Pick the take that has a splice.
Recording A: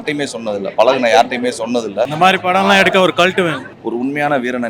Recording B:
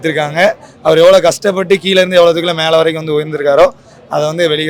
A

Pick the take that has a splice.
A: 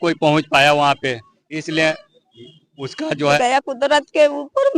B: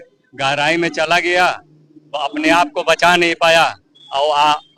A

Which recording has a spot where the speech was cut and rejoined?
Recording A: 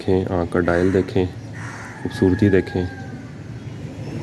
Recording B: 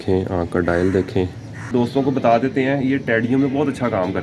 B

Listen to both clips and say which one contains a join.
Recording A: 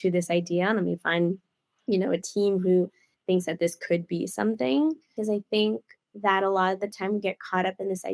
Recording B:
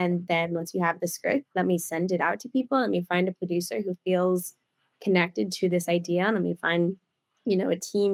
A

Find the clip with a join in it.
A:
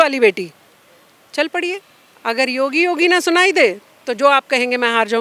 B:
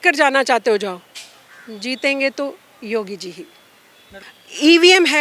B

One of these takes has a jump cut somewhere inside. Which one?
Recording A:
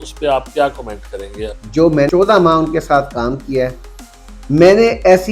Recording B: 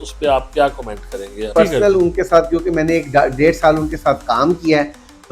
A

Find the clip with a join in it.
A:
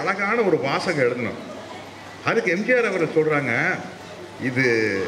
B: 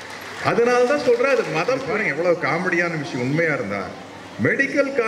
B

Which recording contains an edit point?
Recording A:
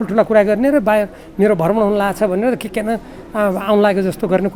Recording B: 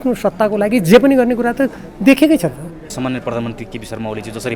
B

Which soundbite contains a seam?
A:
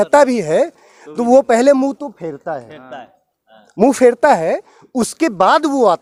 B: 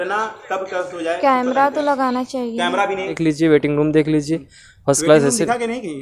B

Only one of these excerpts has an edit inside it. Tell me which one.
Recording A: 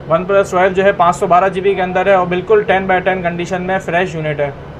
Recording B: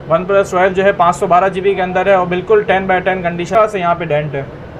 B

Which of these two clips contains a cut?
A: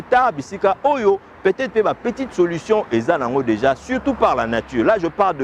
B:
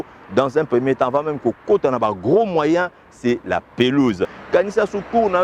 B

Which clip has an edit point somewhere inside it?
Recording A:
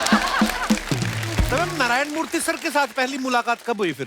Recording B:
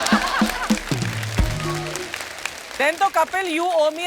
A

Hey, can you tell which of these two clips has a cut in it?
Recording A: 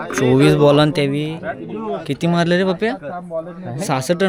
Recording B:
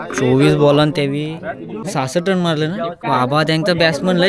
B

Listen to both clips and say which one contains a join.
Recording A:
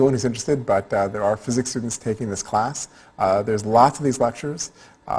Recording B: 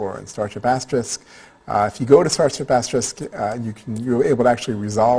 B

